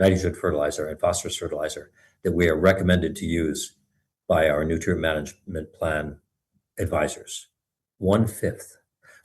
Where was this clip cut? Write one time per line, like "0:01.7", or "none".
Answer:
0:06.5